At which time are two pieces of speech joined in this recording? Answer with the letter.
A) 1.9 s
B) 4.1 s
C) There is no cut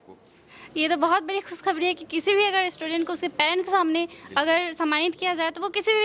C